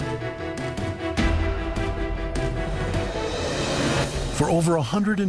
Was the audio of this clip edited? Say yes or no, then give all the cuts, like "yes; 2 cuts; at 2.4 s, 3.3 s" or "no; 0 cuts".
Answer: yes; 1 cut; at 3.4 s